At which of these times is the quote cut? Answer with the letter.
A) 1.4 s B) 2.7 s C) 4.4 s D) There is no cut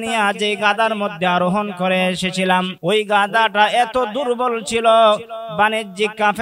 B